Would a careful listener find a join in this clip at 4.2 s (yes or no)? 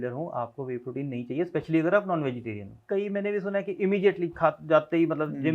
no